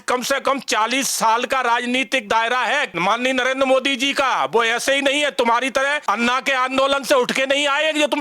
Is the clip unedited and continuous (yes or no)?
no